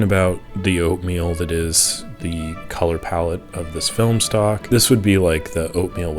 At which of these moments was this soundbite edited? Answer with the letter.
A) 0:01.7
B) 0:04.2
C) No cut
C